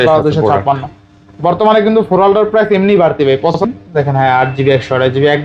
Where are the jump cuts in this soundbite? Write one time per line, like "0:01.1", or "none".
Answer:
0:03.6